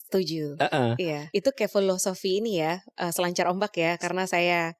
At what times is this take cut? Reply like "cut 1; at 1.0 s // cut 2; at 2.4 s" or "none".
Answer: cut 1; at 1.2 s